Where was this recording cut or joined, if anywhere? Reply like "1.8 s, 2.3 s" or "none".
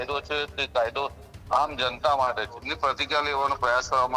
2.7 s